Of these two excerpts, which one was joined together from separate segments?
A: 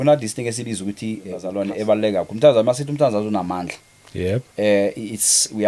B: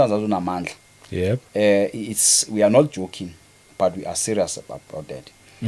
A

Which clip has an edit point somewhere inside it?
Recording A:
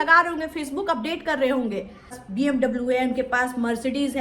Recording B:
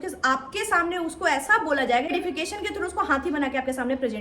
A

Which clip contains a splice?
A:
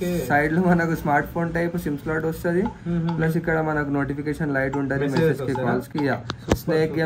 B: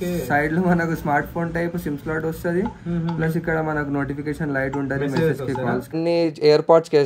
B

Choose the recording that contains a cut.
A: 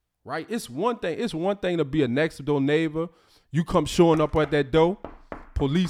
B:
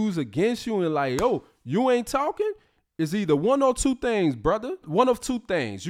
B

